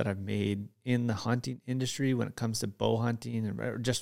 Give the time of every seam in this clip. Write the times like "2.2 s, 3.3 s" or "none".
none